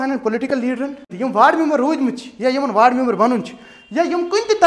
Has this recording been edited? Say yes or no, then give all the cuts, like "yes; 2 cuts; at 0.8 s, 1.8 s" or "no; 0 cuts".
yes; 1 cut; at 1.1 s